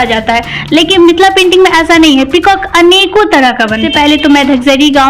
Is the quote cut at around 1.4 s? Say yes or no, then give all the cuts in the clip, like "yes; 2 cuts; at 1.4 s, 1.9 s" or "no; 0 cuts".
no; 1 cut; at 3.8 s